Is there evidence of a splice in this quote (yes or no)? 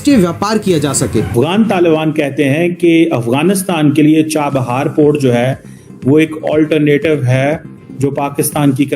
yes